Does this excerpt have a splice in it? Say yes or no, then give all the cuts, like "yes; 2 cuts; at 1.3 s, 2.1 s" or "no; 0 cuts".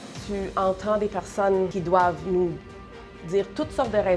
yes; 1 cut; at 1.8 s